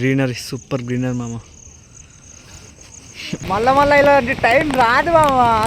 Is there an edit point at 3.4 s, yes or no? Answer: yes